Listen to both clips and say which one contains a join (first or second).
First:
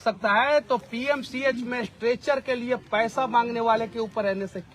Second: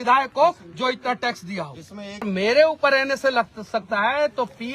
second